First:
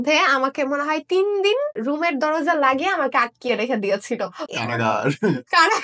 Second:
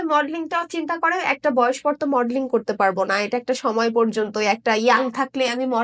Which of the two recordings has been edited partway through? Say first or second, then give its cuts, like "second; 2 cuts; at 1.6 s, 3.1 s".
first; 2 cuts; at 1.8 s, 4.5 s